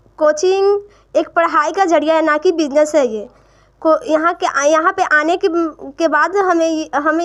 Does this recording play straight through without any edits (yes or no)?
yes